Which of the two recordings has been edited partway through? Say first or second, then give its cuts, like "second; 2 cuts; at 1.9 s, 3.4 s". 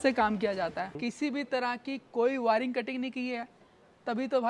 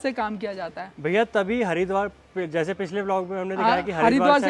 first; 1 cut; at 0.9 s